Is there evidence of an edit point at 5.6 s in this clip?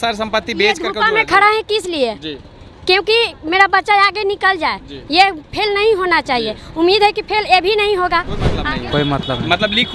no; 1 cut; at 8.6 s

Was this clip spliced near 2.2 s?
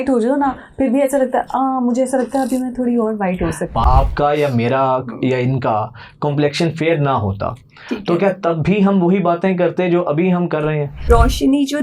no; 2 cuts; at 3.8 s, 11.1 s

